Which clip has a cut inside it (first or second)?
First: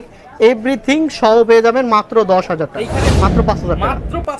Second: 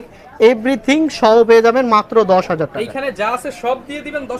first